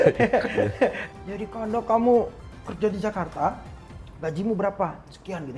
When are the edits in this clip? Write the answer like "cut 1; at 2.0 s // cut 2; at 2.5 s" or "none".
cut 1; at 1.0 s